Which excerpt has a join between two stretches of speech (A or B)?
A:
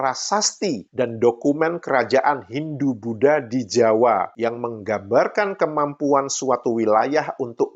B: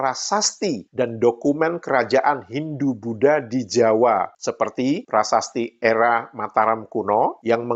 A